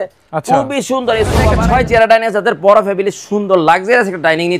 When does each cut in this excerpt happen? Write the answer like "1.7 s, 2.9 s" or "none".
1.5 s